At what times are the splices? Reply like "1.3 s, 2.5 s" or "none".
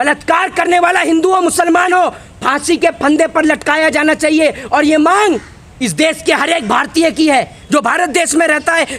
none